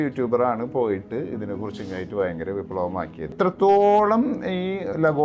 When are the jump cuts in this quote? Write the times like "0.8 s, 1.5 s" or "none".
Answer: 3.3 s